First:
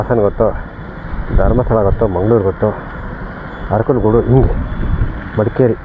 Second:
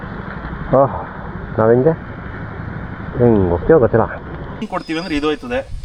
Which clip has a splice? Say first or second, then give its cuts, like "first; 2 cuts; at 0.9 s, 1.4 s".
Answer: second; 1 cut; at 4.6 s